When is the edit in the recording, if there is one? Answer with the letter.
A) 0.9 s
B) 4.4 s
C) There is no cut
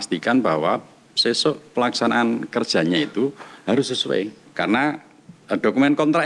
B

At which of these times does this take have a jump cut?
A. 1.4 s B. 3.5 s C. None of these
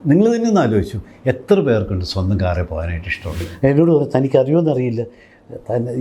B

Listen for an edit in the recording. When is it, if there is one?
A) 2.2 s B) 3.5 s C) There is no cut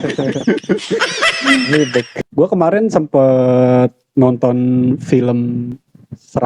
A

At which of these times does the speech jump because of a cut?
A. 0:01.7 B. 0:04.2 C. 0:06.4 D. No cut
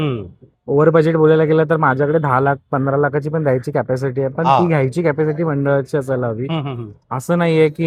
D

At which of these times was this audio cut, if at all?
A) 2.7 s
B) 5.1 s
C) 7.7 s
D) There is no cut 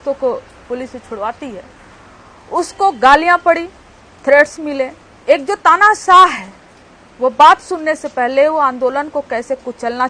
B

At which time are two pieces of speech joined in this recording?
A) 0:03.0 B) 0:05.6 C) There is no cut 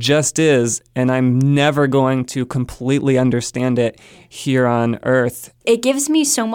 B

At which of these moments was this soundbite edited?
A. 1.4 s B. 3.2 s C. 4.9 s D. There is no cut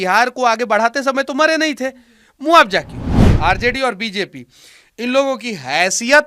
B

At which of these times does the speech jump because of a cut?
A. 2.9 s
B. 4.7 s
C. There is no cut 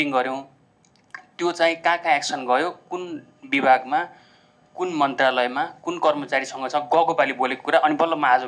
C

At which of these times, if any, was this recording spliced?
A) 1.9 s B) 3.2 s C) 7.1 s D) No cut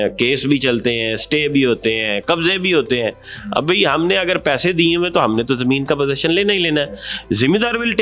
D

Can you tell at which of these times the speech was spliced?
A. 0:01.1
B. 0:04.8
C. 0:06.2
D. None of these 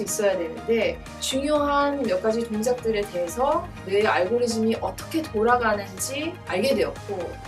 A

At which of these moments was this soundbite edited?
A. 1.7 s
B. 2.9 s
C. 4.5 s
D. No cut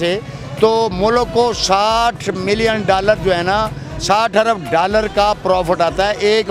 D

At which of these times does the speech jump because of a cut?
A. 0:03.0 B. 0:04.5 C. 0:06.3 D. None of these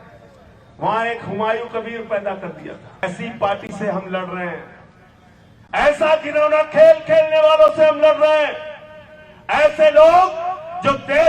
A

